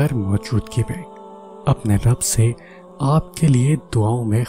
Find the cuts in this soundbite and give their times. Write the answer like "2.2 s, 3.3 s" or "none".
none

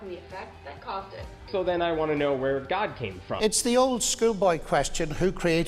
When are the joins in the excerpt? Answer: 3.2 s

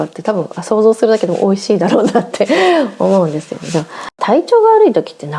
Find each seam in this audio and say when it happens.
4.2 s

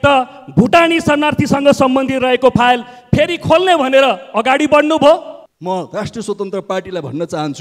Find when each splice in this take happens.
5.3 s

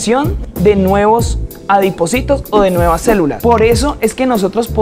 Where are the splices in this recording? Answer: 3.4 s

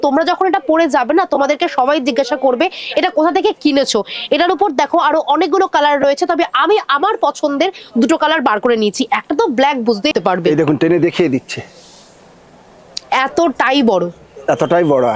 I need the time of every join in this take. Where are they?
10.1 s

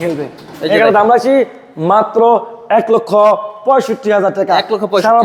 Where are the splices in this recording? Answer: none

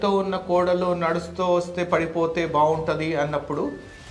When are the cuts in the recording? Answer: none

